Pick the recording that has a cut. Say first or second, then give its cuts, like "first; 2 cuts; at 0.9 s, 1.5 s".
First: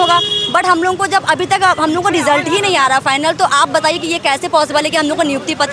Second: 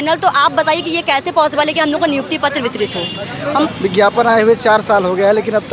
second; 1 cut; at 3.7 s